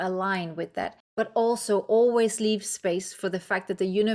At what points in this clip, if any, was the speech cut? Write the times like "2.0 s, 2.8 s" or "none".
1.0 s